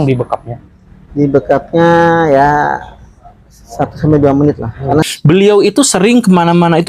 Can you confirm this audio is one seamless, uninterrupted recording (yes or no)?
no